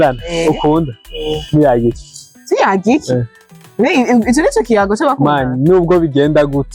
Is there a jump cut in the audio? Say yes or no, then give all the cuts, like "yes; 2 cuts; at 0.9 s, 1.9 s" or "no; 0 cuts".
no; 0 cuts